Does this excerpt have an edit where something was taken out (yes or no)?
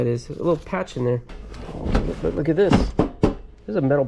yes